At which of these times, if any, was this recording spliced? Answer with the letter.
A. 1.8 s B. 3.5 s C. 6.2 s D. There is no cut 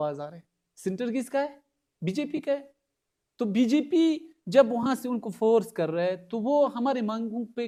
D